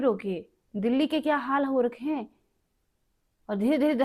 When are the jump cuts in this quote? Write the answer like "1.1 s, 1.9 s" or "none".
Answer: none